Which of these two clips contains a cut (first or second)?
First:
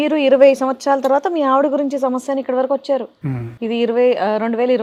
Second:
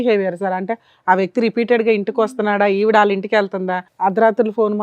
second